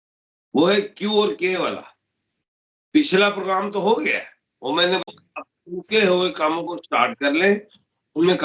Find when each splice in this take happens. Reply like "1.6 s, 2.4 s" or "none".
5.1 s